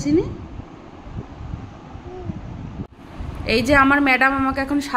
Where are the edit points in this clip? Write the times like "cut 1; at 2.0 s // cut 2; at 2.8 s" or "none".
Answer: cut 1; at 2.9 s